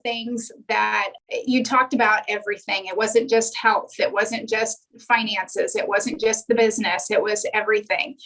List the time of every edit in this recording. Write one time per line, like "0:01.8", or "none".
0:01.2

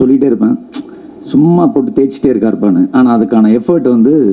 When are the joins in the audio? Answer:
none

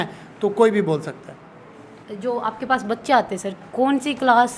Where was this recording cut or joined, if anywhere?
none

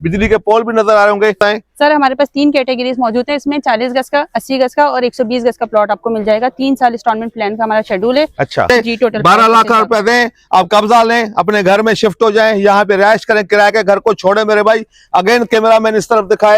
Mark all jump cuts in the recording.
0:01.4
0:08.7

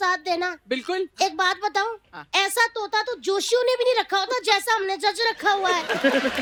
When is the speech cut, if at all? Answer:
none

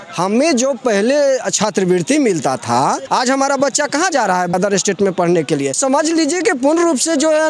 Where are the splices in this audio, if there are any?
0:03.0
0:04.5
0:05.8

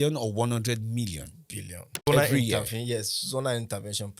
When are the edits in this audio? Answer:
0:02.1

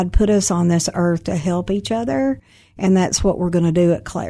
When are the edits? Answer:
none

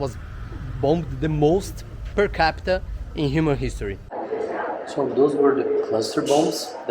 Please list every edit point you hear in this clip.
0:04.0

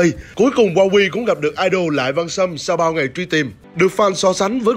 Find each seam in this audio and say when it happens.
none

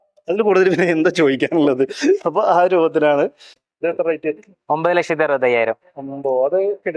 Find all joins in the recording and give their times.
0:03.5

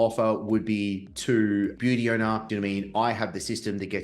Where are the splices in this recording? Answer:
0:01.1
0:02.5

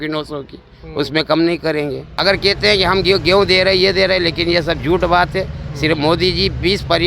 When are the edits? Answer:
0:02.1

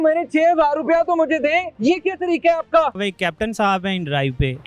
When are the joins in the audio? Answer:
0:01.7
0:03.0

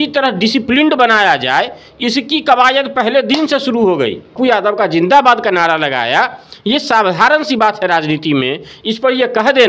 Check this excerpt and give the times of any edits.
0:04.3

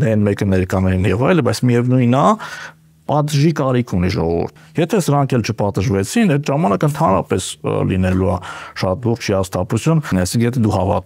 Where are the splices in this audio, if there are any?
0:04.5
0:10.1

